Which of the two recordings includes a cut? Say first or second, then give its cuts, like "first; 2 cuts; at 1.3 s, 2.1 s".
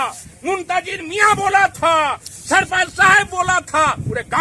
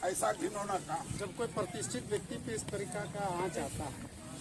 second; 1 cut; at 1.1 s